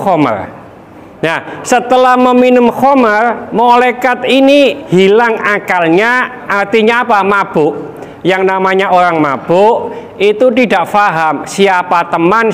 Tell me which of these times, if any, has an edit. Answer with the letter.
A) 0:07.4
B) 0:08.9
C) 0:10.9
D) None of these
D